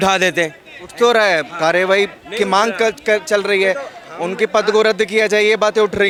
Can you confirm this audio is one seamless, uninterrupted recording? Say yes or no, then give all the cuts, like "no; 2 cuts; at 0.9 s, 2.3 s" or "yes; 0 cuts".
yes; 0 cuts